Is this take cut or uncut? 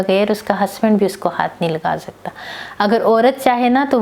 uncut